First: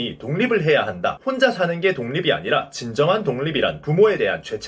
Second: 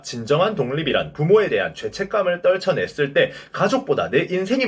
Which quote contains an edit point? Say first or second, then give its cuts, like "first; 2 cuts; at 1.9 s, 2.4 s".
first; 1 cut; at 1.2 s